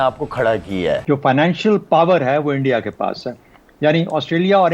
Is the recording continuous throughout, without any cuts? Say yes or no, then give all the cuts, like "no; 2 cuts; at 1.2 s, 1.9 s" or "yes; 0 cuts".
no; 1 cut; at 1.0 s